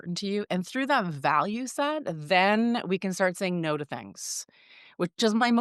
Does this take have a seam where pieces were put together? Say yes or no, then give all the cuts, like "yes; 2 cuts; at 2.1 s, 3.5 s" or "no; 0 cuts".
no; 0 cuts